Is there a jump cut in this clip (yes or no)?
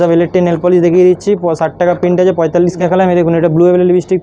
yes